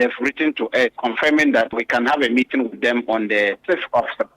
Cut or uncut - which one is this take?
cut